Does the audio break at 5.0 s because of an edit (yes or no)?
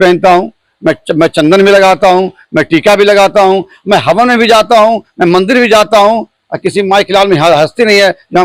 no